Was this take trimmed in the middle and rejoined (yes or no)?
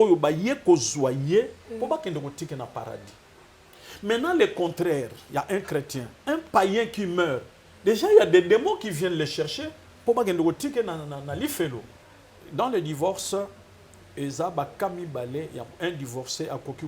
yes